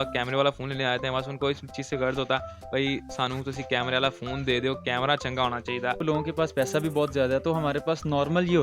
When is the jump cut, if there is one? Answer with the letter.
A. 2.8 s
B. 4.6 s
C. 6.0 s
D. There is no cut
C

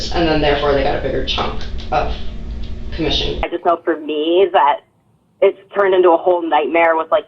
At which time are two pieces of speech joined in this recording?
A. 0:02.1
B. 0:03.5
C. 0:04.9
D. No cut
B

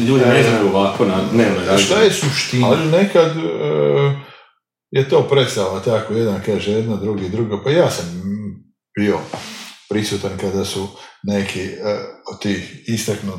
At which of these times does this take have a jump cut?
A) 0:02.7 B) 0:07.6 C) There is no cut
A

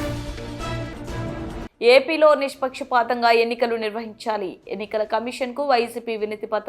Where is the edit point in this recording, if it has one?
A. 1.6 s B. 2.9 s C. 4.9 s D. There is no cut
A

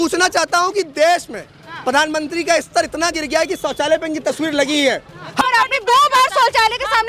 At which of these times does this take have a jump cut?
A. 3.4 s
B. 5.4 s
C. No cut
B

